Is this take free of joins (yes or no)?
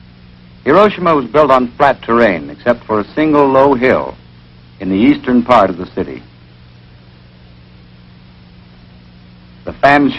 yes